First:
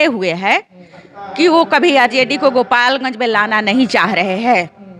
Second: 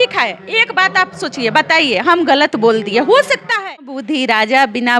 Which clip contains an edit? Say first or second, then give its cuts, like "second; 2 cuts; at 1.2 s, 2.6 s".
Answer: second; 1 cut; at 4.0 s